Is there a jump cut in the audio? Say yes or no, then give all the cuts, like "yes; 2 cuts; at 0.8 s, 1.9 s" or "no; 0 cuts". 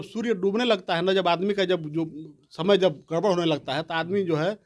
no; 0 cuts